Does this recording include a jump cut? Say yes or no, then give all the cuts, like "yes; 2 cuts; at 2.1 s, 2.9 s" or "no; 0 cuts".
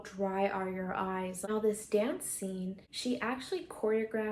yes; 2 cuts; at 1.4 s, 2.9 s